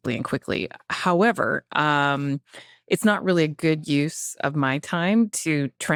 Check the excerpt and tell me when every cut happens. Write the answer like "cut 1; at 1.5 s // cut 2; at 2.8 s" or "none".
none